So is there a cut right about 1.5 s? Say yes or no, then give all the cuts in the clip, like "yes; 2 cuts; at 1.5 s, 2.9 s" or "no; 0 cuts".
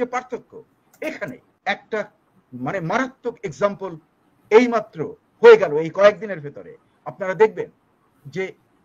yes; 1 cut; at 1.5 s